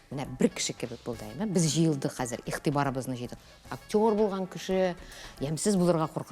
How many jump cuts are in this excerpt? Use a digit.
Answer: 1